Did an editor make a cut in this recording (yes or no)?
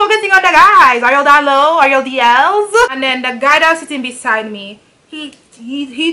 yes